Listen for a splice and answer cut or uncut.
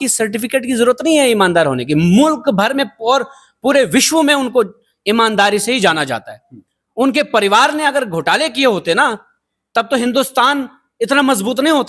uncut